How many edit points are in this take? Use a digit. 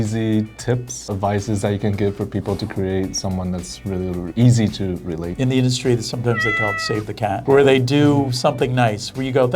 2